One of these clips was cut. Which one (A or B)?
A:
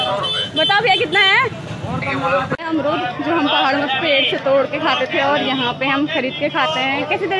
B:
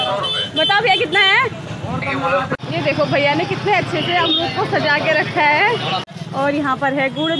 B